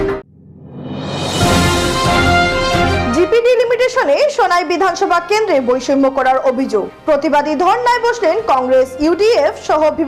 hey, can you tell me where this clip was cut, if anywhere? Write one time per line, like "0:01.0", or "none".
none